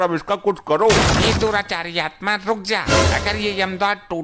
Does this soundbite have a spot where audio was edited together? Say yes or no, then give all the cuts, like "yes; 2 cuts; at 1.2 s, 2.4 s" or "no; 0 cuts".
no; 0 cuts